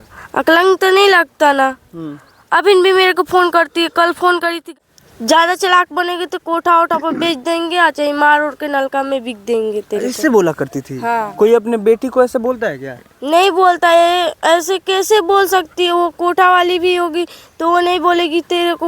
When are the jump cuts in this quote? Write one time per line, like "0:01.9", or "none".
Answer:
0:04.7